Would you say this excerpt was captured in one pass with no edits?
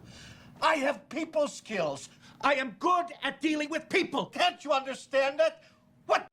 yes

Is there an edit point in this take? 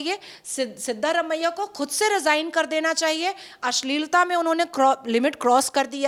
no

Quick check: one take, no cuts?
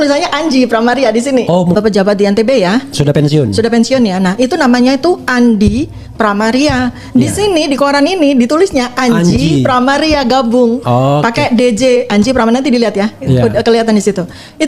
no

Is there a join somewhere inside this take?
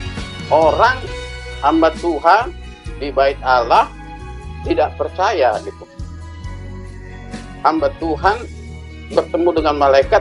no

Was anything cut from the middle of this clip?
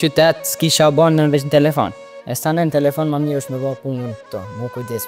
no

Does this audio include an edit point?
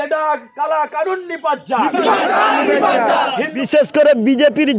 yes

